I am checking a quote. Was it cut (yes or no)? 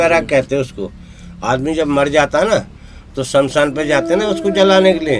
no